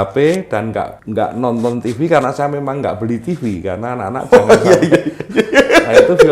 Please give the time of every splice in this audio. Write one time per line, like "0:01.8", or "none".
0:01.0

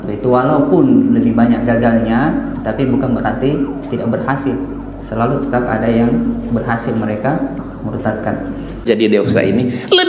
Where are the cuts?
0:08.8

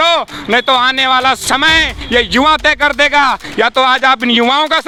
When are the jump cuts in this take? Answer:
none

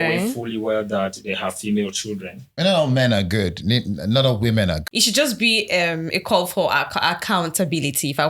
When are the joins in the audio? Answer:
0:02.5
0:04.8

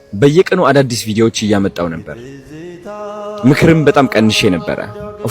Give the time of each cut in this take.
none

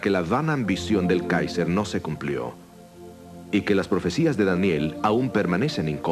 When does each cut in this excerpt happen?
0:04.7

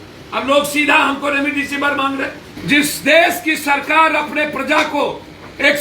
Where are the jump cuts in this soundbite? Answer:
0:02.5

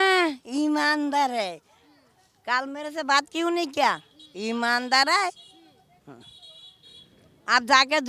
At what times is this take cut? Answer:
none

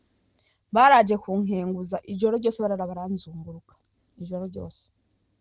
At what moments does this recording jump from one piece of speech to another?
none

